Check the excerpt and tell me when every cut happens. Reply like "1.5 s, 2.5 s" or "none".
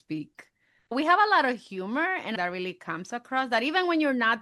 0.9 s, 2.3 s